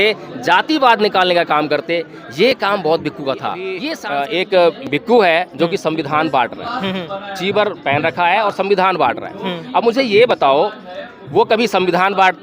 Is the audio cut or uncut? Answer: cut